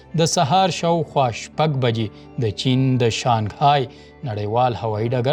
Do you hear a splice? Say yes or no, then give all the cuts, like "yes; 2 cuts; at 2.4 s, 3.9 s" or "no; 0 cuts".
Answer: no; 0 cuts